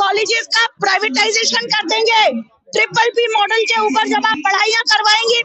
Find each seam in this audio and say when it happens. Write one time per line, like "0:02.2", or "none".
none

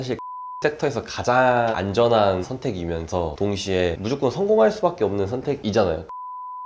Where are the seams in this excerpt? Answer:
none

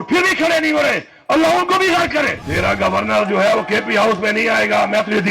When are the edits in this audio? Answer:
0:02.4

